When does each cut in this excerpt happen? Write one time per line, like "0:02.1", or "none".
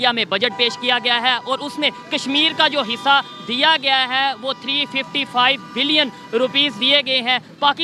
none